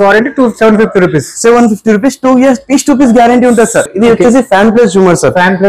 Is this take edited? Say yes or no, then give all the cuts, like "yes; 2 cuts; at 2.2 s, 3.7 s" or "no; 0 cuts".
yes; 1 cut; at 3.9 s